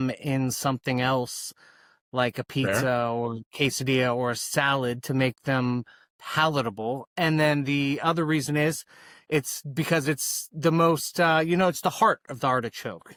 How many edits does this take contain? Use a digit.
0